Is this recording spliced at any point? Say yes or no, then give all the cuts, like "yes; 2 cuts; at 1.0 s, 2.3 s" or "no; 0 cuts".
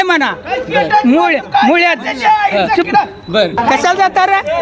yes; 1 cut; at 3.5 s